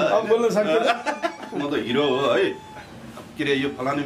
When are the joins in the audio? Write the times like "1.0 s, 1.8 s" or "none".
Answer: 1.6 s